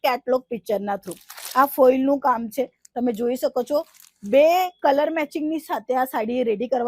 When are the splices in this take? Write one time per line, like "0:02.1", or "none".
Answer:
none